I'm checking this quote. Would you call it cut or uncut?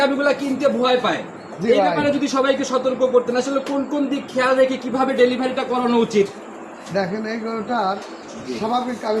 uncut